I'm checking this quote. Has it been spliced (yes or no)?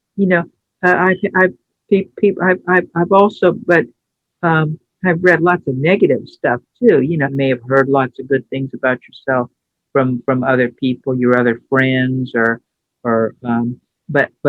yes